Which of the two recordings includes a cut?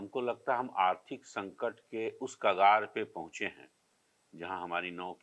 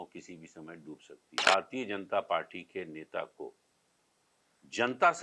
second; 1 cut; at 1.3 s

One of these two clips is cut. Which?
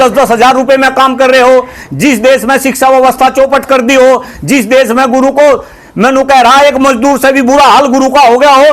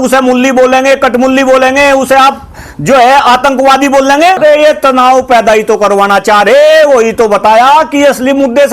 second; 1 cut; at 4.4 s

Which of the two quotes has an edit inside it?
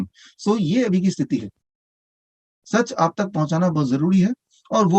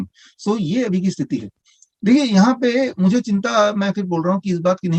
first; 1 cut; at 1.9 s

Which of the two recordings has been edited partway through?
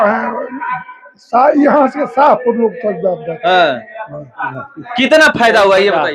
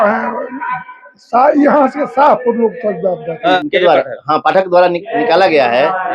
second; 1 cut; at 3.6 s

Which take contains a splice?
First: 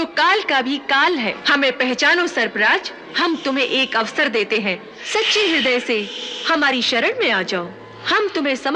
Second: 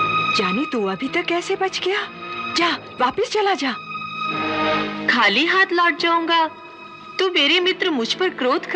first; 3 cuts; at 1.4 s, 3.1 s, 4.9 s

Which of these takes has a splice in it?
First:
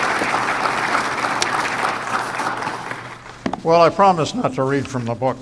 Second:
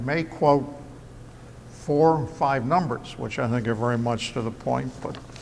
first; 1 cut; at 1.1 s

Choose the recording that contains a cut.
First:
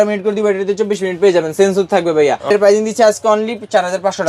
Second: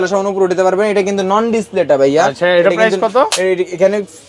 first; 1 cut; at 2.4 s

